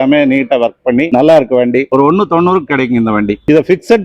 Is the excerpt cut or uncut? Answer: uncut